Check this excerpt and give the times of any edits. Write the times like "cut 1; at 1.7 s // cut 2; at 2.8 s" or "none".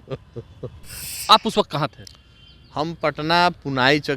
cut 1; at 1.1 s